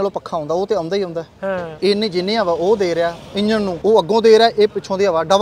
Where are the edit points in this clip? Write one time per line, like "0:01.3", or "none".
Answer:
0:01.7
0:03.8